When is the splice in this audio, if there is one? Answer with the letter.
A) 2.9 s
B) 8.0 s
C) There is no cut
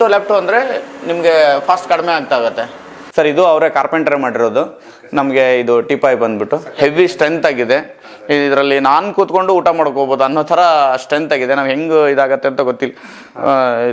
A